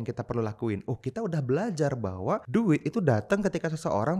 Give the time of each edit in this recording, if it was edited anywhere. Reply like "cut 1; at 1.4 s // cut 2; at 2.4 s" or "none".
cut 1; at 2.4 s